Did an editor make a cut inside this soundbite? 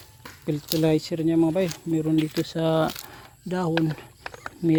no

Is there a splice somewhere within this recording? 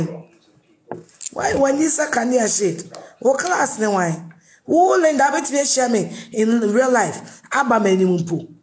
no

